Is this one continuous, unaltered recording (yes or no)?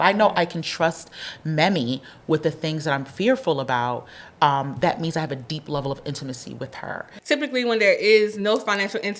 no